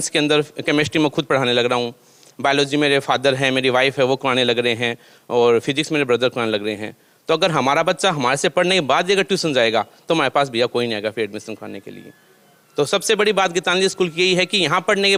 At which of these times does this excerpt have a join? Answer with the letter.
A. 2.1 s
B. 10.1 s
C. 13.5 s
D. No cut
D